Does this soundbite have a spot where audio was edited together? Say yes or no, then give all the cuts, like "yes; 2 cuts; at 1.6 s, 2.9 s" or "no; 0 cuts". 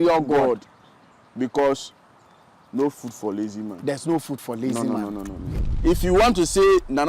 yes; 1 cut; at 5.7 s